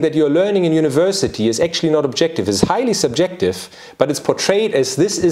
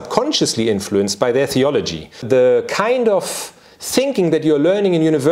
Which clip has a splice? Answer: second; 1 cut; at 2.2 s

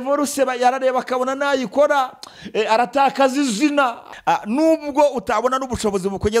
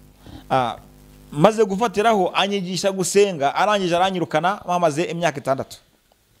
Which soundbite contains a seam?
first; 1 cut; at 4.1 s

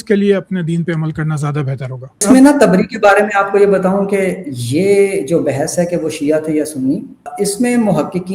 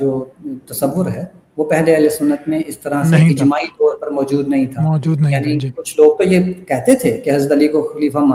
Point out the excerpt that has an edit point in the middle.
first; 2 cuts; at 2.2 s, 7.3 s

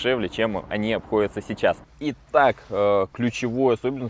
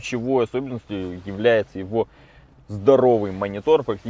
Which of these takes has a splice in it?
first; 1 cut; at 1.9 s

